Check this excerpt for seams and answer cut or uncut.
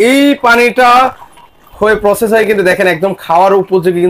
uncut